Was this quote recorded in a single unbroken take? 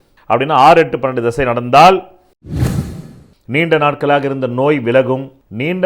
no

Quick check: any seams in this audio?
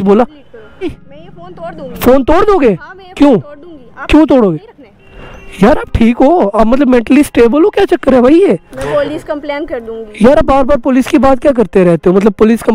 yes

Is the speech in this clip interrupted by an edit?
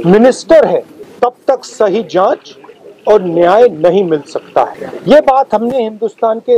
yes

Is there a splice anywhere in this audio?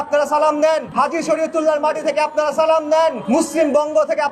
yes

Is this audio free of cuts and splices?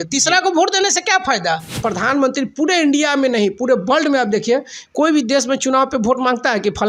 no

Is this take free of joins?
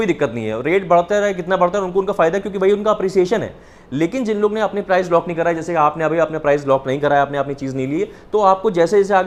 yes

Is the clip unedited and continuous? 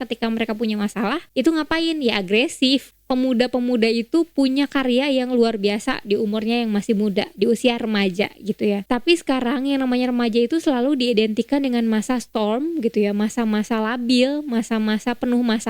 no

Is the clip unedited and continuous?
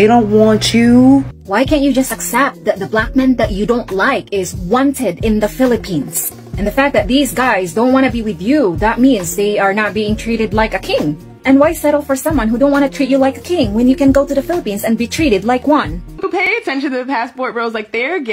no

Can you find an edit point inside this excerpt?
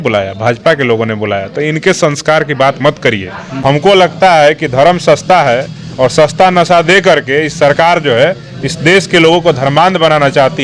yes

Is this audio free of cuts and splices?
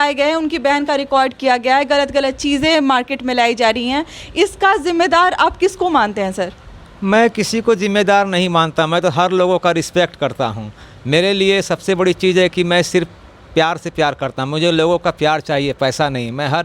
yes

